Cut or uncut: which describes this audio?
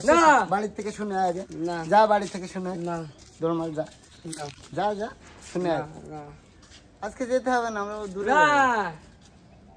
uncut